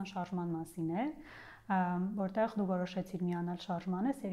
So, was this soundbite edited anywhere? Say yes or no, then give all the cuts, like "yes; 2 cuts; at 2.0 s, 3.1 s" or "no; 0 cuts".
no; 0 cuts